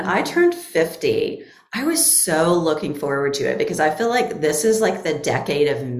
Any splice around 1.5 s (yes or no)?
no